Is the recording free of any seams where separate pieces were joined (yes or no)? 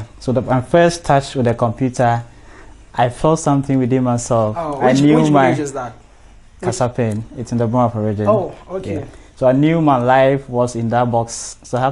yes